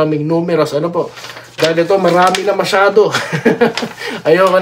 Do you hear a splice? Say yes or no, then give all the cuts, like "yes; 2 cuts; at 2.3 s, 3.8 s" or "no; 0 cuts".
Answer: no; 0 cuts